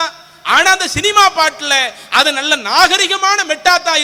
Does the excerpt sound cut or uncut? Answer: uncut